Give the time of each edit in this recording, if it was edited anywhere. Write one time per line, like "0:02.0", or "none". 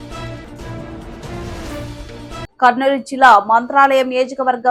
none